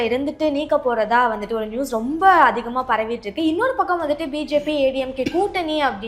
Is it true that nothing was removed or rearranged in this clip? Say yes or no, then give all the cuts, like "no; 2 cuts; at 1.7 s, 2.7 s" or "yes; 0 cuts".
yes; 0 cuts